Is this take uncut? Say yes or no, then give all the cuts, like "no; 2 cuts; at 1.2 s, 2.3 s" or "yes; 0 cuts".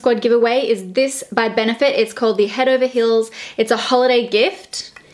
yes; 0 cuts